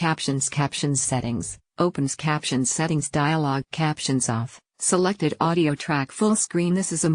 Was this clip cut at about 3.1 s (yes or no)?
no